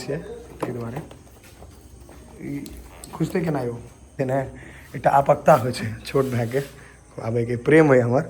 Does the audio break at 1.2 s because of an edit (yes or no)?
no